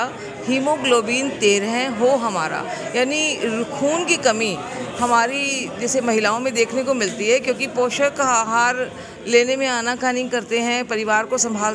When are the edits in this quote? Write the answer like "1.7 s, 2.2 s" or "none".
none